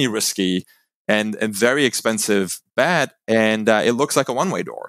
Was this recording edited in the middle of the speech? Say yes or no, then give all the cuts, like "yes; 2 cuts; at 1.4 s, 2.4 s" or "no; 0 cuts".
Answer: no; 0 cuts